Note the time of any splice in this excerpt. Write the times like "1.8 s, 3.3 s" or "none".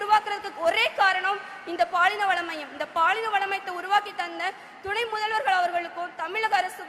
none